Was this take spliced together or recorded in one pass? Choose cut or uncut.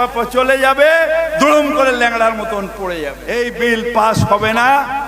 cut